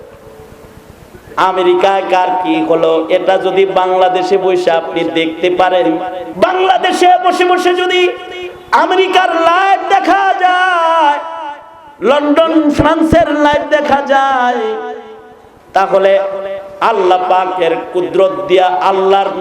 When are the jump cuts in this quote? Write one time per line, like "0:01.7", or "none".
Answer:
0:06.2